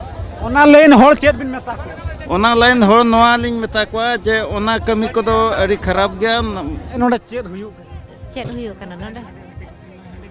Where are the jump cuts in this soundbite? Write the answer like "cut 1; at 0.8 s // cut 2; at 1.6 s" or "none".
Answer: cut 1; at 7.0 s